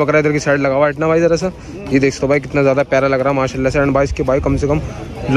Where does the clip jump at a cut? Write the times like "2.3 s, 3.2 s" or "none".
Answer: none